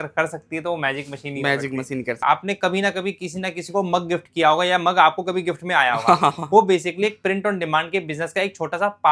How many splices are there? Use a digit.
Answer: 1